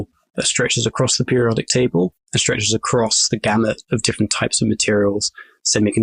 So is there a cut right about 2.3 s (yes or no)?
yes